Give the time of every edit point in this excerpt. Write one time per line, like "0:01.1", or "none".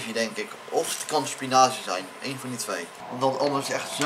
0:03.0

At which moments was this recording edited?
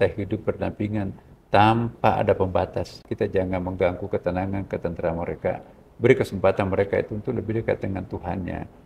0:03.1

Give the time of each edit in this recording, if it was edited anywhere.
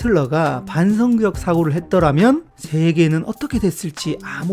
0:02.6

